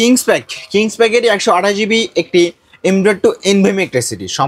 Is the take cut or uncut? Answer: uncut